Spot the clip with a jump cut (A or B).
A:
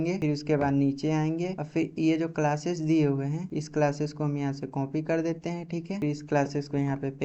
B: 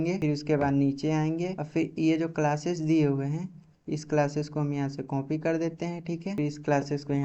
A